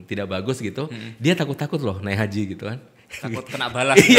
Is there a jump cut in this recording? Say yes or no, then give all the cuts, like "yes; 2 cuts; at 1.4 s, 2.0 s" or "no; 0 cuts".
no; 0 cuts